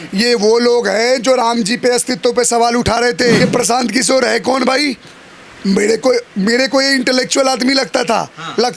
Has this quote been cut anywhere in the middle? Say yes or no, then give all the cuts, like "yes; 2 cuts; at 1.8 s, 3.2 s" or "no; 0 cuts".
yes; 1 cut; at 3.4 s